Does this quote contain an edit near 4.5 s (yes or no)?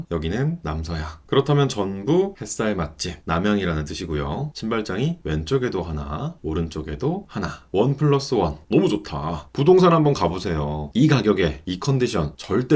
yes